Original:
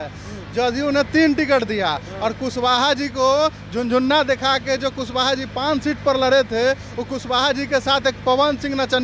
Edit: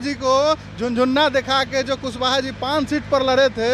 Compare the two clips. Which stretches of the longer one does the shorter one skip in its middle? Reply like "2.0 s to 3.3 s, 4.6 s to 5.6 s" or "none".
none